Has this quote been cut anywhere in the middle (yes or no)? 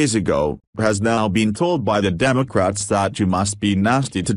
no